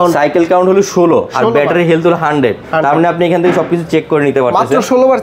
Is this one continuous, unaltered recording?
yes; 0 cuts

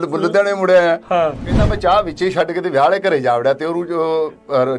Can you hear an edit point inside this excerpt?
yes; 1 cut; at 1.6 s

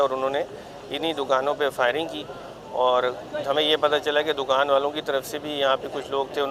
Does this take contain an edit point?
no; 0 cuts

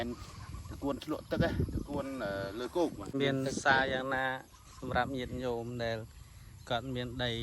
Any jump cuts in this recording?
yes; 1 cut; at 3.1 s

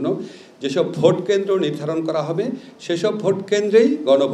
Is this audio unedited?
yes; 0 cuts

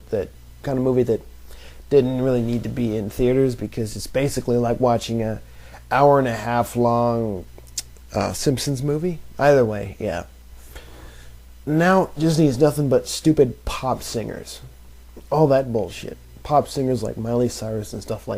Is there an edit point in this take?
no; 0 cuts

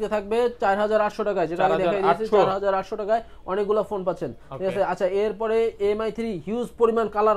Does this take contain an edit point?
no; 0 cuts

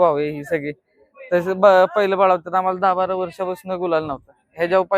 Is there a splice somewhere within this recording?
no; 0 cuts

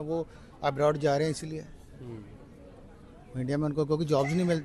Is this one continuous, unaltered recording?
yes; 0 cuts

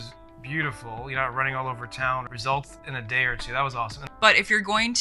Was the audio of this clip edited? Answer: yes; 2 cuts; at 2.3 s, 4.2 s

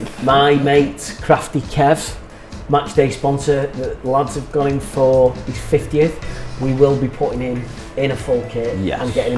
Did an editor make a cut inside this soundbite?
no; 0 cuts

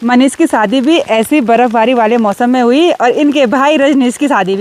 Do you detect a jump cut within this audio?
no; 0 cuts

